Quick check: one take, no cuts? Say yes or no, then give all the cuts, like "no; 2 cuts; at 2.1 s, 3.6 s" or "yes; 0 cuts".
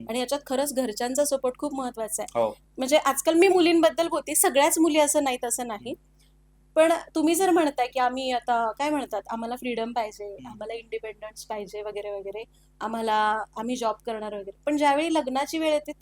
no; 1 cut; at 2.6 s